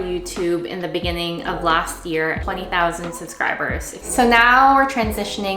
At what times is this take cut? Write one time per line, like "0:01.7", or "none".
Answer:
0:02.4
0:04.0

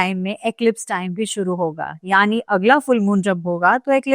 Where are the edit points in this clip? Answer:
none

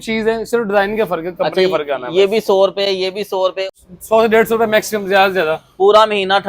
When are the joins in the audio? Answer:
0:03.6

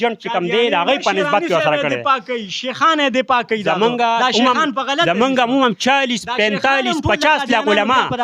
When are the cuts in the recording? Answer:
none

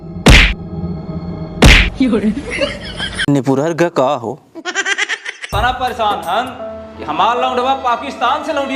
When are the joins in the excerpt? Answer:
0:03.1
0:05.5

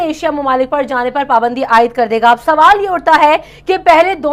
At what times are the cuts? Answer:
none

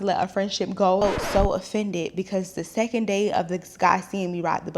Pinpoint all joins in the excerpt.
0:01.0

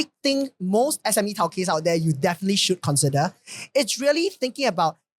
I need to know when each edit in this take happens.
0:01.0

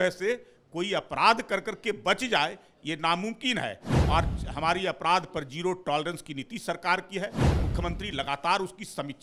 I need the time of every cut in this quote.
none

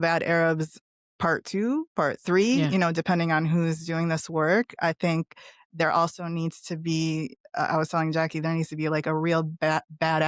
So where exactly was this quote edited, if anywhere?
none

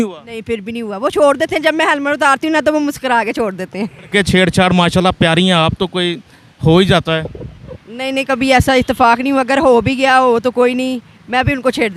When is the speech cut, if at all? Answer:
0:04.1

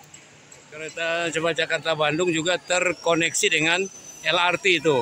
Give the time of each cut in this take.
0:00.9

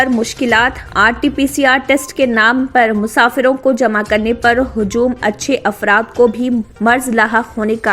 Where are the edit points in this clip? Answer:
none

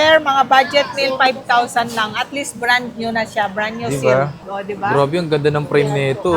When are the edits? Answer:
0:04.4

